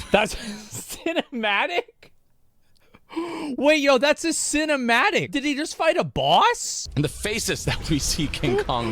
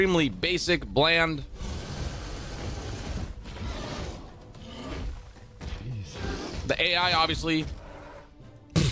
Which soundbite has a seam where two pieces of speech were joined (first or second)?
first